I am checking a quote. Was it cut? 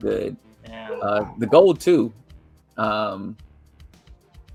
no; 0 cuts

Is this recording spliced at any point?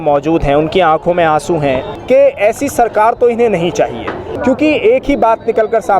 yes; 2 cuts; at 1.9 s, 4.3 s

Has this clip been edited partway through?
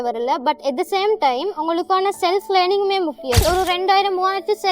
yes; 1 cut; at 3.4 s

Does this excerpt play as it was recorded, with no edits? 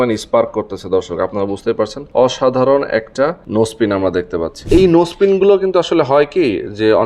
no; 3 cuts; at 2.0 s, 3.4 s, 4.6 s

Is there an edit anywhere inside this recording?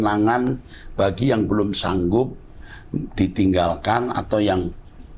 no; 0 cuts

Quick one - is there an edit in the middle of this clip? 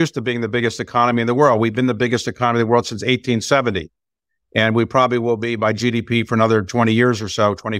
no; 0 cuts

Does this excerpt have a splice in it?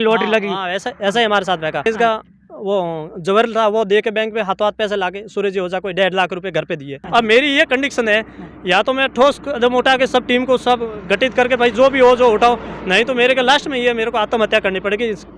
yes; 2 cuts; at 1.9 s, 7.0 s

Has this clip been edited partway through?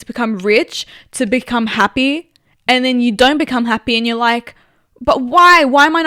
no; 0 cuts

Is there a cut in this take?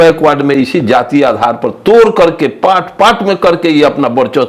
no; 0 cuts

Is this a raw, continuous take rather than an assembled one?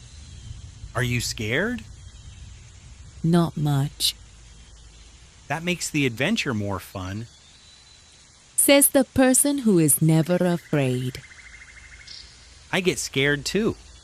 no; 1 cut; at 0.9 s

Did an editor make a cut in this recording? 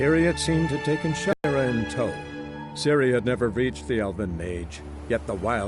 yes; 1 cut; at 1.3 s

